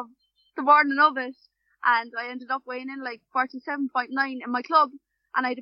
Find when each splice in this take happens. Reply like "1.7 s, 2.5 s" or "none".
none